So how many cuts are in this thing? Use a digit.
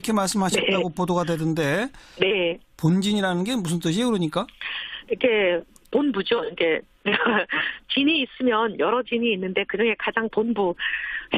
1